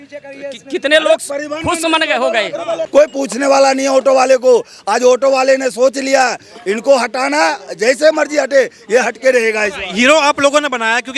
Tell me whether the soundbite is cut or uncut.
cut